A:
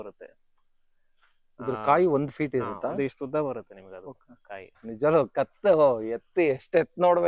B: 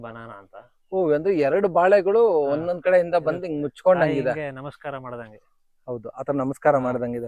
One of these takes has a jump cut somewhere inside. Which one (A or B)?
A